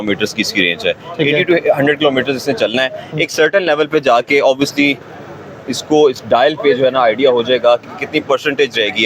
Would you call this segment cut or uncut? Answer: uncut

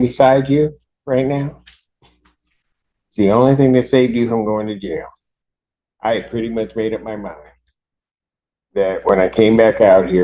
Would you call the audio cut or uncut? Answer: uncut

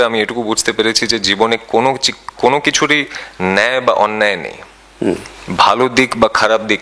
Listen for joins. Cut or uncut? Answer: uncut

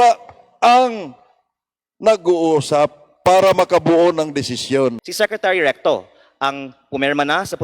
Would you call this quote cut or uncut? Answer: cut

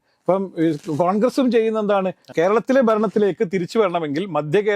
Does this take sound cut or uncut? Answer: cut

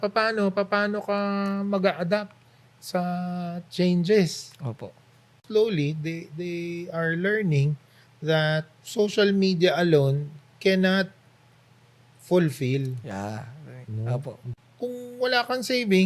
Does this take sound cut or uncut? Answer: cut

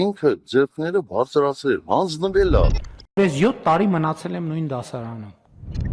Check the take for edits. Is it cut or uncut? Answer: uncut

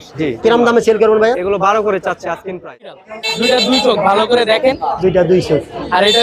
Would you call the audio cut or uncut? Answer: cut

